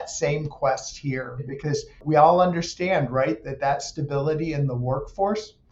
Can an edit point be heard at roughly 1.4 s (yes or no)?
yes